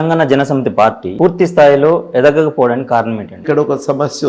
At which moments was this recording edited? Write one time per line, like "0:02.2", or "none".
0:01.1
0:03.4